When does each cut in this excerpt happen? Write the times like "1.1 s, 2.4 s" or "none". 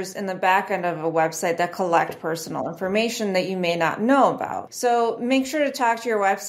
4.6 s